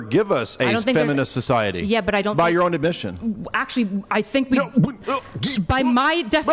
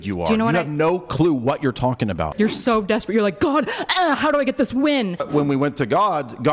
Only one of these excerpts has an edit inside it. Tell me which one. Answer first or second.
second